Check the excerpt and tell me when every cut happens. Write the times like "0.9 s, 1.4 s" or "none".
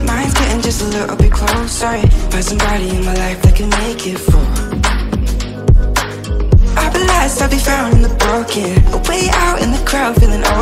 none